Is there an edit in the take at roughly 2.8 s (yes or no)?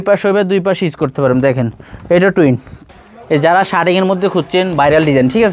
yes